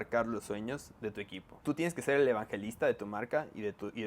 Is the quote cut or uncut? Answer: cut